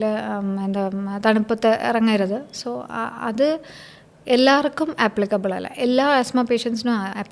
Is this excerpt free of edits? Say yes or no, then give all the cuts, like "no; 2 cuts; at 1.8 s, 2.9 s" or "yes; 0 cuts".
yes; 0 cuts